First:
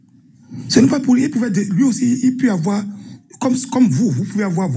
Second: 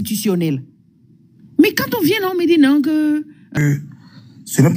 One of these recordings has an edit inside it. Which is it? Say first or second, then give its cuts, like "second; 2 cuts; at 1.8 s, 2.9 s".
second; 1 cut; at 3.5 s